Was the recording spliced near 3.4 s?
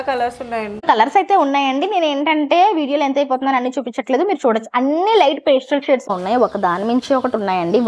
no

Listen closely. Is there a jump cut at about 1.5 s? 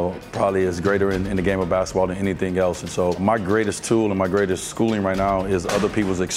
no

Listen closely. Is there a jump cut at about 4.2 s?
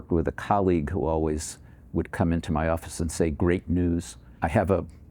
yes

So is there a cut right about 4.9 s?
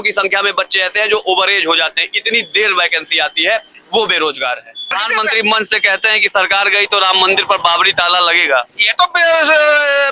yes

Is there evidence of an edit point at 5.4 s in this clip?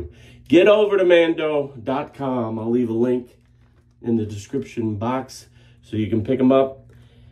no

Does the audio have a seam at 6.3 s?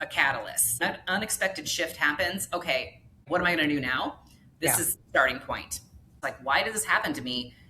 yes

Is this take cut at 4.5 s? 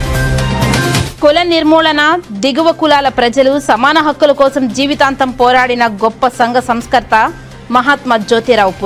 no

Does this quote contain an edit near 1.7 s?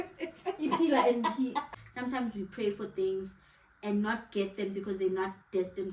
yes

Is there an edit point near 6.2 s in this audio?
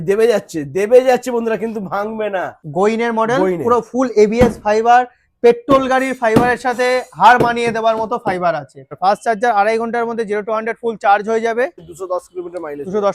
no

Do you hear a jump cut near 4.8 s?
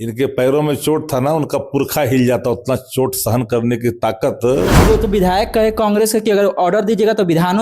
yes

